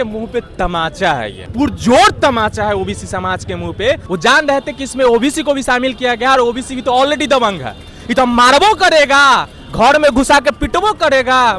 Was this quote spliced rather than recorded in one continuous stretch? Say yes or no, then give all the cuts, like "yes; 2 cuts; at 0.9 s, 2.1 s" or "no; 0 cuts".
yes; 2 cuts; at 1.4 s, 4.0 s